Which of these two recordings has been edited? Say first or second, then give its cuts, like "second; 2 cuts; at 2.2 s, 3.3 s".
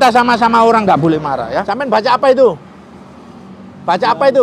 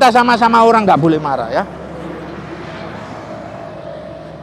first; 1 cut; at 1.7 s